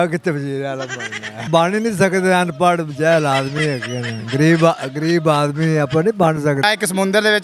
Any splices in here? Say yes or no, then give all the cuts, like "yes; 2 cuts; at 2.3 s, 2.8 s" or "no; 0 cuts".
yes; 2 cuts; at 1.5 s, 6.6 s